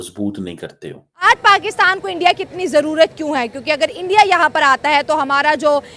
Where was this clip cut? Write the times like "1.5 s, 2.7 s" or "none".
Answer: 1.2 s